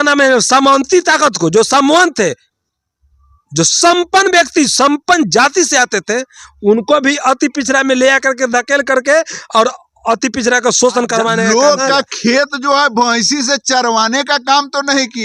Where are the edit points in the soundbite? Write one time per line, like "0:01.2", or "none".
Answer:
0:11.4